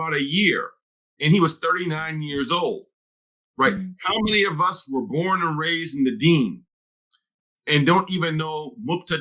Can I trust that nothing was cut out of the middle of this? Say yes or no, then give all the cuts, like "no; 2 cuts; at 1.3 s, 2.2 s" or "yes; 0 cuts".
yes; 0 cuts